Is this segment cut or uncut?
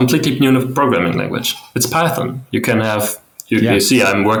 uncut